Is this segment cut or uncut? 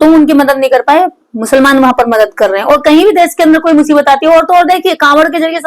uncut